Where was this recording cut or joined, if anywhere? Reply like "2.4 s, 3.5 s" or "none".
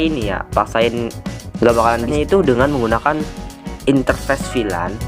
2.1 s